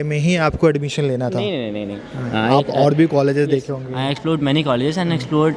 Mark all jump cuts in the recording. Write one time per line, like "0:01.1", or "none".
none